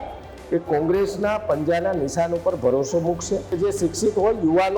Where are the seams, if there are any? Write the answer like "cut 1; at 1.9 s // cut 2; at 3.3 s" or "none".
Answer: cut 1; at 3.6 s